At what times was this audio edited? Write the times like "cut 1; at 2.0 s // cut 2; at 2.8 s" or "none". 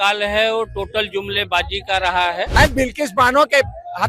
cut 1; at 2.5 s